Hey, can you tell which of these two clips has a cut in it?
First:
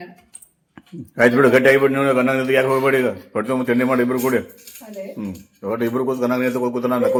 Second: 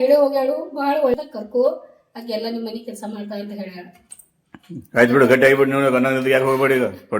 second; 1 cut; at 1.1 s

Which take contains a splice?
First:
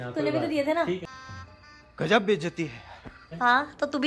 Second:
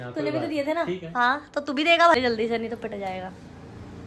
second; 2 cuts; at 1.1 s, 2.1 s

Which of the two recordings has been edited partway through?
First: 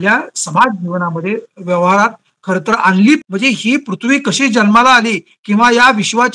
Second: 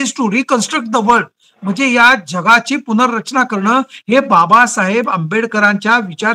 first; 1 cut; at 3.2 s

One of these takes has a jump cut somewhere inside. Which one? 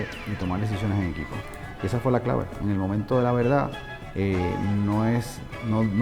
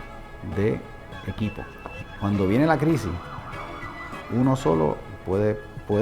second; 2 cuts; at 1.0 s, 2.1 s

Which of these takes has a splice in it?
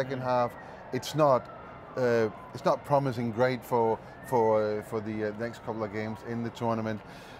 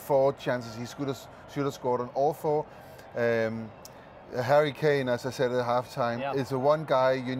second; 1 cut; at 3.0 s

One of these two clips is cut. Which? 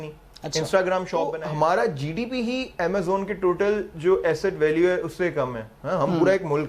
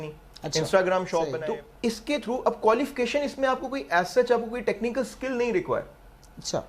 first; 1 cut; at 1.4 s

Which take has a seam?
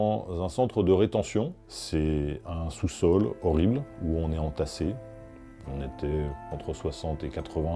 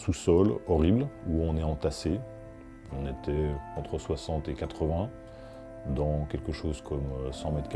first; 1 cut; at 1.7 s

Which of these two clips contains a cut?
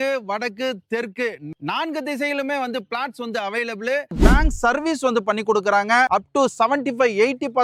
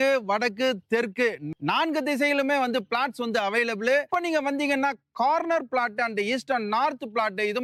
first; 1 cut; at 4.1 s

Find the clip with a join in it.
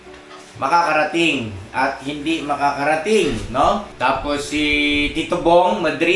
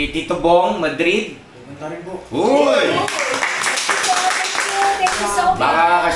first; 1 cut; at 3.9 s

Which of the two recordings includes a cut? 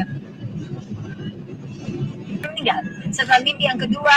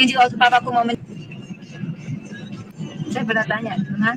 second; 1 cut; at 1.0 s

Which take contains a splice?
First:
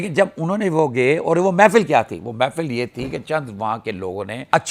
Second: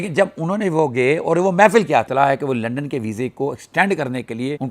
second; 1 cut; at 2.1 s

